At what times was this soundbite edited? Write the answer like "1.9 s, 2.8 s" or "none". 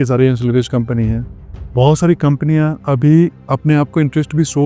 3.4 s